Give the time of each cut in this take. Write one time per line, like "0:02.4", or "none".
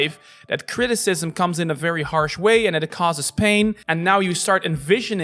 0:03.8